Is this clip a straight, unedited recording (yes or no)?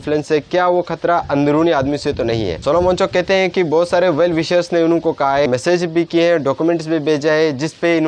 yes